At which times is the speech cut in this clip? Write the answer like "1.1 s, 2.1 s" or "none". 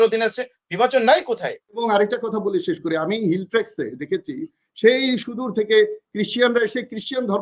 1.8 s